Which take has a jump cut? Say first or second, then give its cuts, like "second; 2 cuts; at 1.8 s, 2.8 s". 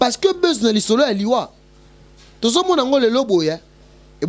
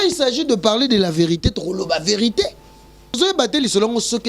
second; 1 cut; at 3.2 s